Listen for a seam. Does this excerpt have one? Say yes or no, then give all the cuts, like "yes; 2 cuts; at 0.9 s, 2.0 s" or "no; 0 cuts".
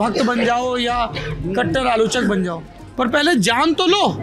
no; 0 cuts